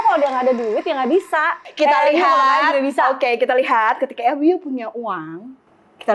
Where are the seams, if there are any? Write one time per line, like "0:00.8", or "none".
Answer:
0:01.6